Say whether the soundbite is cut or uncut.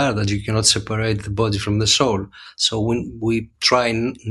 uncut